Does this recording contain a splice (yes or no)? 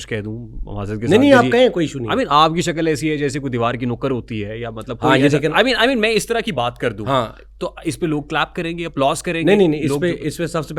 no